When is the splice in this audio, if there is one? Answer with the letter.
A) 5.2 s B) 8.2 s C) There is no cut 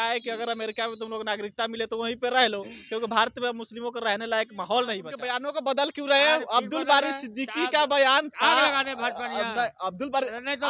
A